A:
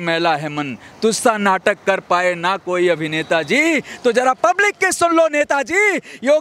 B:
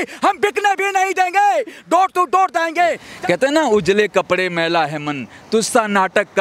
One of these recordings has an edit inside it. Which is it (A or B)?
B